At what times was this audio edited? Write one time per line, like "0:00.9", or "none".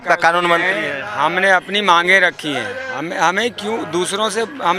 none

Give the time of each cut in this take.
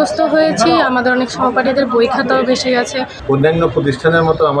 0:03.1

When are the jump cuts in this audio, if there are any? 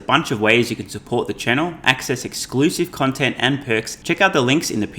0:03.9

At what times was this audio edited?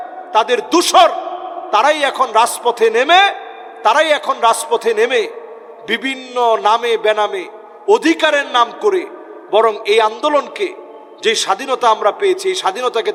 none

